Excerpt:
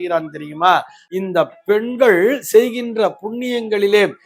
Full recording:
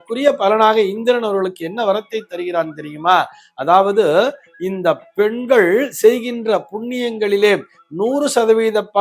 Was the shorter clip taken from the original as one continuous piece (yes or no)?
no